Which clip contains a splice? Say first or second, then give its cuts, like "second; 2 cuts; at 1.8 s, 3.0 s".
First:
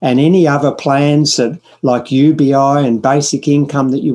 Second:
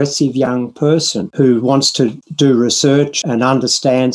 second; 3 cuts; at 1.2 s, 2.2 s, 3.1 s